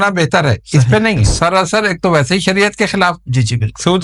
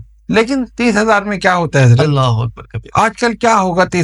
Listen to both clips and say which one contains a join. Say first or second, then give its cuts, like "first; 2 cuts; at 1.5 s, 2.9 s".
first; 1 cut; at 1.3 s